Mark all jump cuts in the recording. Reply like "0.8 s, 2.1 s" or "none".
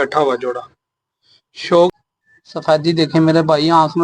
1.9 s